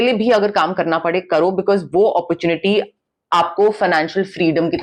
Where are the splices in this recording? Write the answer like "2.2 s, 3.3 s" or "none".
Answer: none